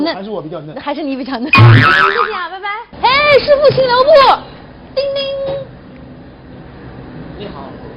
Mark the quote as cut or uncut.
uncut